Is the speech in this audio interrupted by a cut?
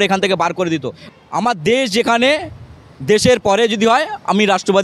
yes; 1 cut; at 1.0 s

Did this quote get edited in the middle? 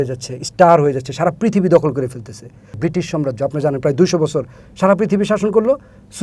yes; 1 cut; at 2.7 s

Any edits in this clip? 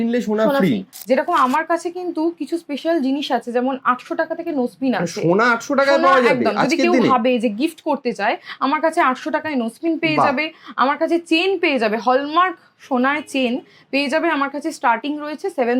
yes; 1 cut; at 0.9 s

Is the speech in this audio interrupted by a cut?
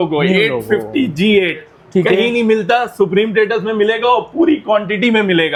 no; 0 cuts

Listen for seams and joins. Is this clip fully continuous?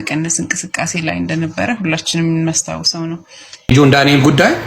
no; 1 cut; at 3.7 s

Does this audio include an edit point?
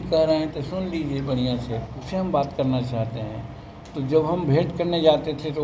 yes; 1 cut; at 2.1 s

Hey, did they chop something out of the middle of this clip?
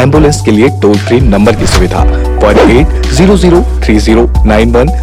no; 0 cuts

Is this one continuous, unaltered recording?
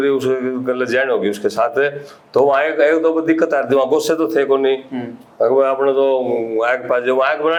yes; 0 cuts

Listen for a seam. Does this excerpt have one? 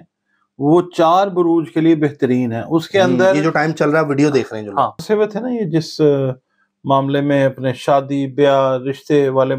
yes; 1 cut; at 5.0 s

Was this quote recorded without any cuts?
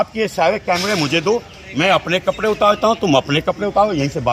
yes; 0 cuts

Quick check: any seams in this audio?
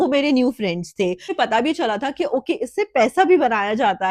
yes; 1 cut; at 1.3 s

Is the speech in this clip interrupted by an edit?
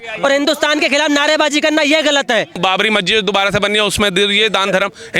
yes; 1 cut; at 2.6 s

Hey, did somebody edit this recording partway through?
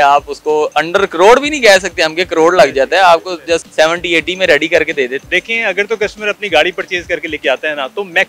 yes; 2 cuts; at 3.7 s, 5.2 s

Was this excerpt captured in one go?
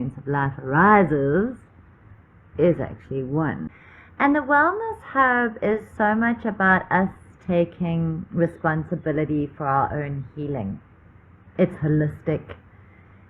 no; 1 cut; at 3.7 s

